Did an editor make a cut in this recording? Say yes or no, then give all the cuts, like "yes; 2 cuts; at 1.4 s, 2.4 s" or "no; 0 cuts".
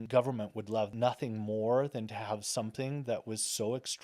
yes; 1 cut; at 0.9 s